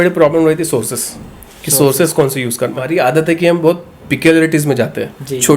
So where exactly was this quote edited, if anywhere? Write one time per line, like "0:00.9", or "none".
0:02.8